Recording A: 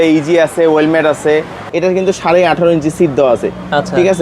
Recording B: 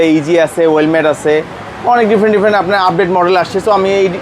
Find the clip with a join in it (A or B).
A